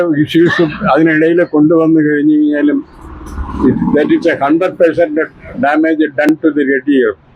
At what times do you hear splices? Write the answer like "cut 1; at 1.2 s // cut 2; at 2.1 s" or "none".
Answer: none

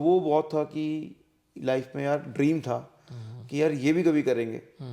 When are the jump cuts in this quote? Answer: none

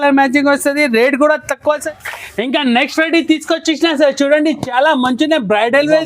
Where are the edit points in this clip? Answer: cut 1; at 1.8 s

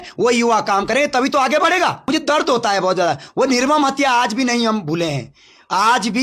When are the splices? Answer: cut 1; at 2.0 s

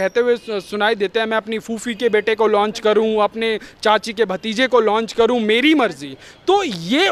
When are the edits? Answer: none

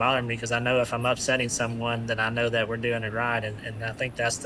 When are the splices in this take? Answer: none

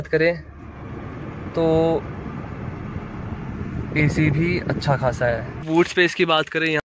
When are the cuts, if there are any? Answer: cut 1; at 5.6 s

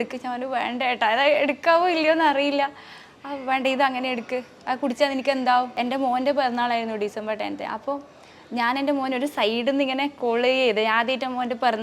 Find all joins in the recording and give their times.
cut 1; at 5.7 s

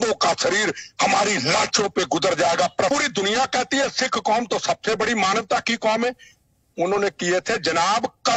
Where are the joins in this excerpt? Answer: cut 1; at 2.9 s

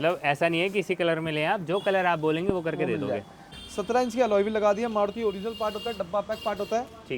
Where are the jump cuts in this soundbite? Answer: cut 1; at 3.6 s

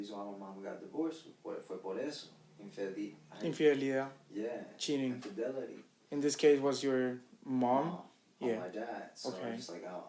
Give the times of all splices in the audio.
none

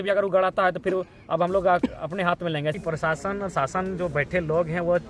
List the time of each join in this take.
cut 1; at 2.8 s

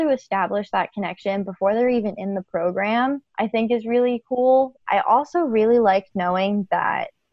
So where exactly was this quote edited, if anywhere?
cut 1; at 3.3 s // cut 2; at 4.8 s

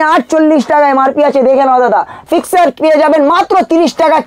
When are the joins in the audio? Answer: cut 1; at 2.2 s

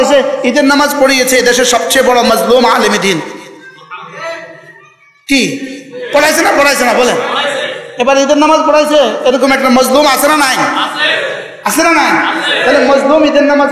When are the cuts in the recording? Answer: none

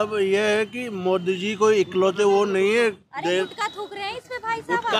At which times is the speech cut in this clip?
none

